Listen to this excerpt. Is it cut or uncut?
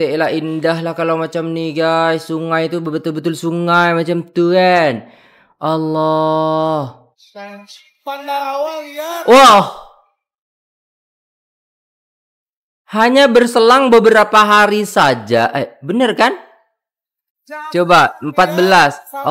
uncut